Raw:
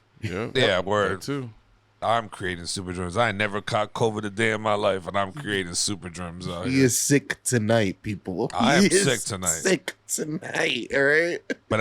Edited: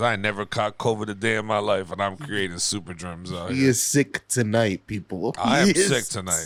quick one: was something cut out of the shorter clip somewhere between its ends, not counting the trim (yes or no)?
no